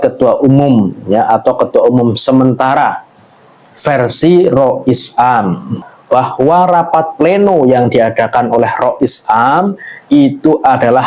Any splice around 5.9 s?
yes; 1 cut; at 5.9 s

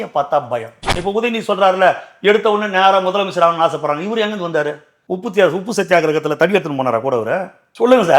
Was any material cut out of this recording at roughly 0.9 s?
yes; 1 cut; at 0.9 s

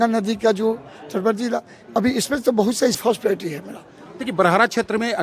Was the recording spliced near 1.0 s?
no; 1 cut; at 3.0 s

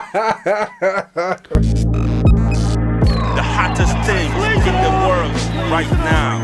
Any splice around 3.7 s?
no; 1 cut; at 1.5 s

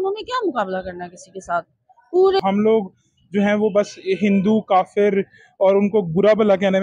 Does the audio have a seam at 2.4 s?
yes; 1 cut; at 2.4 s

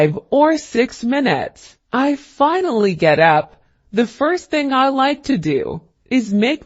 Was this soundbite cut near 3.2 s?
yes; 1 cut; at 3.2 s

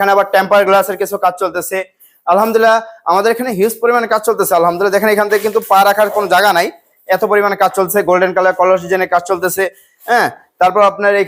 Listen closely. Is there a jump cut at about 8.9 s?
no; 0 cuts

